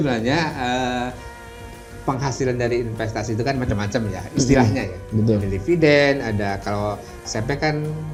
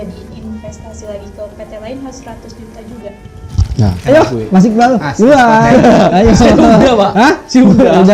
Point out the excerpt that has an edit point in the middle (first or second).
second